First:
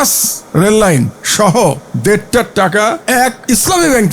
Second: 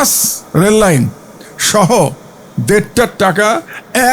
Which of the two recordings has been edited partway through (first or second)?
first